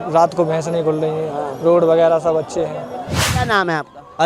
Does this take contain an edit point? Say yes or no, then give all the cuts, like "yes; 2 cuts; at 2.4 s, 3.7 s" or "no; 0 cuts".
yes; 1 cut; at 3.3 s